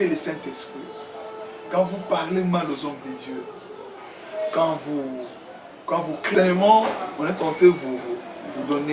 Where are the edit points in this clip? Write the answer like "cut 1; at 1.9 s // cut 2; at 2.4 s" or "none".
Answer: cut 1; at 6.3 s